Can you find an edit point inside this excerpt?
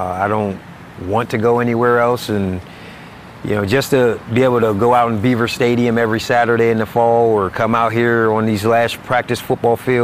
no; 0 cuts

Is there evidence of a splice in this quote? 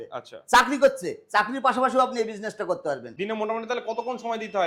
yes; 1 cut; at 3.1 s

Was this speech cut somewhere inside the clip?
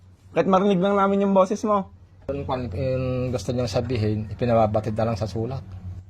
yes; 1 cut; at 2.3 s

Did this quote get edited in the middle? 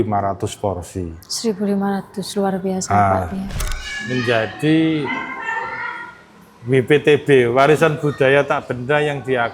yes; 1 cut; at 3.5 s

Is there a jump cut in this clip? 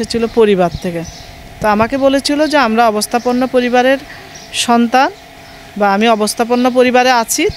no; 0 cuts

